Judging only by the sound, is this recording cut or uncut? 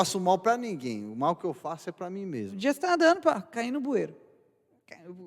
cut